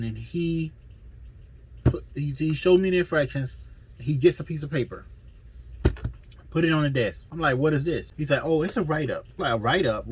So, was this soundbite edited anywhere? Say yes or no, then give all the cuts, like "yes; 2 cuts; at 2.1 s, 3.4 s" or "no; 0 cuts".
yes; 3 cuts; at 7.2 s, 8.1 s, 9.3 s